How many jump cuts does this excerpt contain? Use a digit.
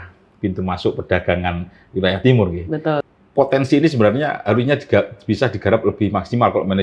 1